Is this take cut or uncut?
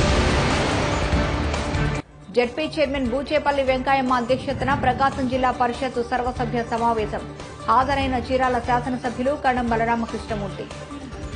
cut